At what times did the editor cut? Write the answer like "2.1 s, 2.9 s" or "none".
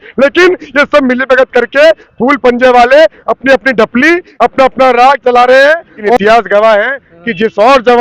6.2 s